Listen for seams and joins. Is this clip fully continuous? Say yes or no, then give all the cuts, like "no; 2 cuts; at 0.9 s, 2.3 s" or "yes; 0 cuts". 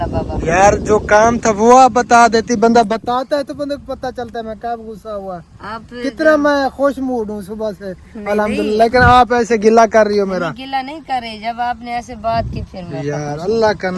yes; 0 cuts